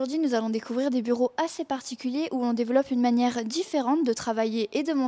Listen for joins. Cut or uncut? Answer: uncut